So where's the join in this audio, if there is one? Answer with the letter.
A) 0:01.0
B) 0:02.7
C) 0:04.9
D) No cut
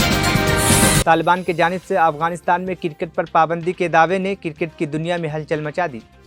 D